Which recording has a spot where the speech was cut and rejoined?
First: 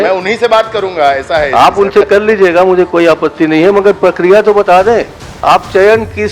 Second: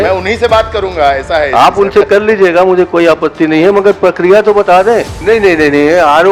second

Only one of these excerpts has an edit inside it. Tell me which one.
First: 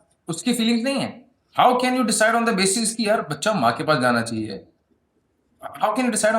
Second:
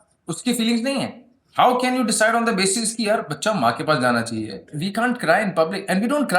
second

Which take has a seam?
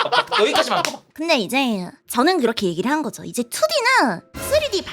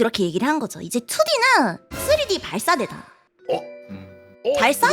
first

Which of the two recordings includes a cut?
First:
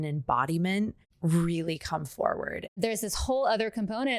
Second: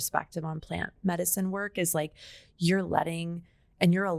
first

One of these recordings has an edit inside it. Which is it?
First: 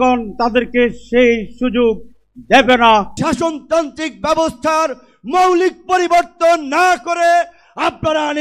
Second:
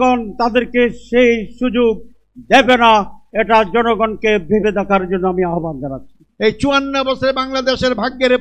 first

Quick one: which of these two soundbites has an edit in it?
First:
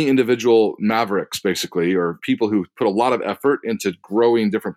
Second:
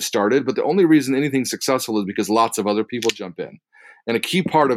first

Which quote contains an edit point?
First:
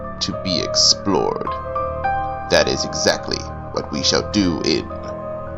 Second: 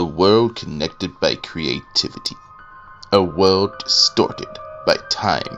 first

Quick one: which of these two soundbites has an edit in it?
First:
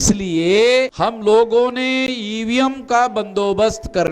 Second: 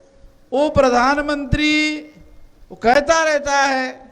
first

